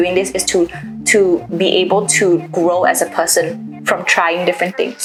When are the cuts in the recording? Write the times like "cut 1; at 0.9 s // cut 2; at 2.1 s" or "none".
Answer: none